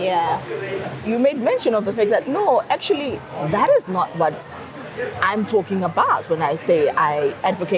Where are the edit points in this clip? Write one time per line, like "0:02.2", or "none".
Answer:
0:01.0